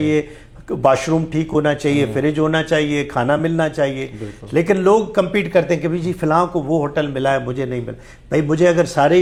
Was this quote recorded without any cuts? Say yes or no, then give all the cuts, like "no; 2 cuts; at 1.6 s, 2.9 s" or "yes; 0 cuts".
yes; 0 cuts